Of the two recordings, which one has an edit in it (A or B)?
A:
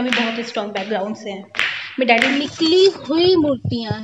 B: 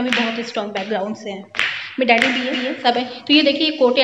A